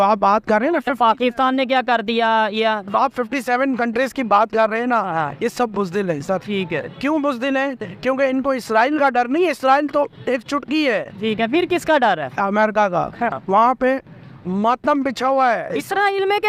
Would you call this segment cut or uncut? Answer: cut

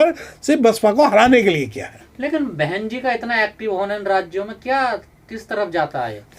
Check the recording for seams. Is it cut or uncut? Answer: uncut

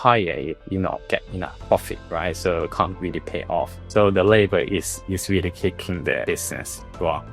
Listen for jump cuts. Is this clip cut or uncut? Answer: uncut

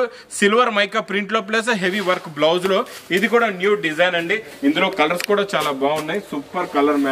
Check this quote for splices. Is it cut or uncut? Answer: cut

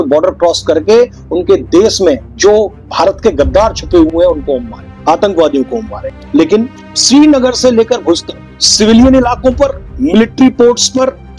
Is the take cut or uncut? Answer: uncut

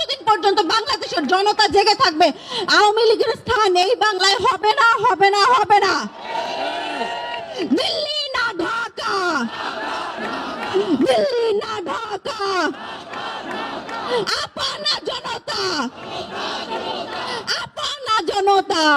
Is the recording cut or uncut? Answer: uncut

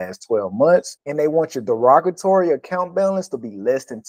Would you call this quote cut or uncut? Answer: uncut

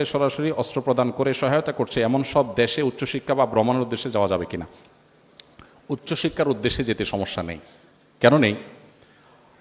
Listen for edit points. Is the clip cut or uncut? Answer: uncut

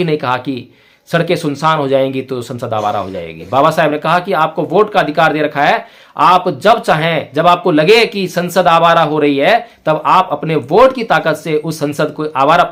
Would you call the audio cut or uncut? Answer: uncut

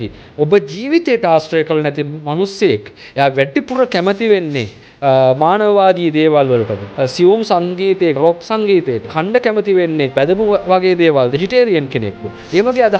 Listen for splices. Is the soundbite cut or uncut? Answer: cut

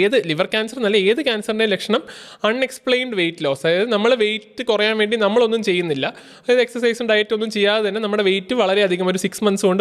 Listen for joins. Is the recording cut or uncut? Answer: uncut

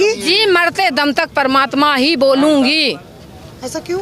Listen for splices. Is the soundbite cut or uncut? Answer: uncut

